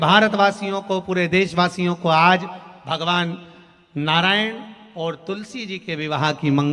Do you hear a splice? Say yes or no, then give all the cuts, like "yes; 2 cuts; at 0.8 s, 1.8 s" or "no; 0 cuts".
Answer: no; 0 cuts